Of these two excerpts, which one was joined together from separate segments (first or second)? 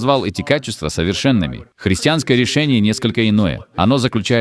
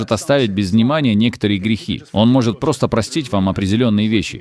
first